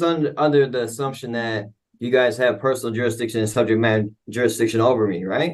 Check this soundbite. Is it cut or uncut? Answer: uncut